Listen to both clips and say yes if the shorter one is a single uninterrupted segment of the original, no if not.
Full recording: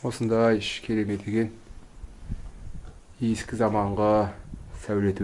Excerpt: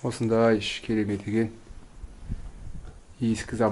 yes